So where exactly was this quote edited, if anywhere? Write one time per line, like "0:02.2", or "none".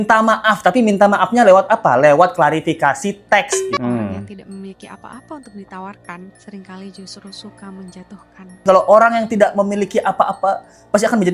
0:03.8
0:08.6